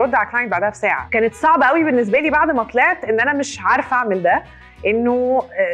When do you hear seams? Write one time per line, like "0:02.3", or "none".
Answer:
none